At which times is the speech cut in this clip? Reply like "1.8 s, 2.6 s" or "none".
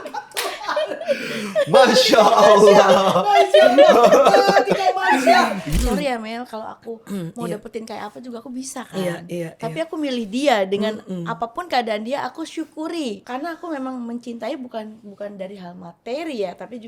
5.6 s, 13.2 s